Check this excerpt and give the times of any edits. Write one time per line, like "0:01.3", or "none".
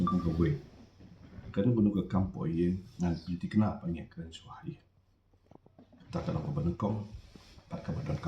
none